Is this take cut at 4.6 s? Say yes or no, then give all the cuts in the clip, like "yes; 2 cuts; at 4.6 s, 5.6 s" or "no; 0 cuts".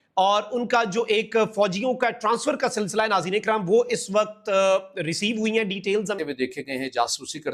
no; 1 cut; at 6.2 s